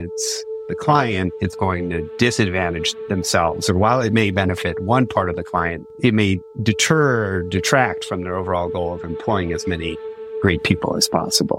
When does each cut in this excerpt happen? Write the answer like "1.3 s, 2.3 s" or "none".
none